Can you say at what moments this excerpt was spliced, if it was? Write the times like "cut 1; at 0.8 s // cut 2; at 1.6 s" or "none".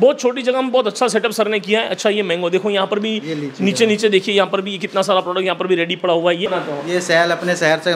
cut 1; at 6.5 s